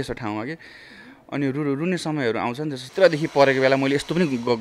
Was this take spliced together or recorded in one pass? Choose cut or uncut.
cut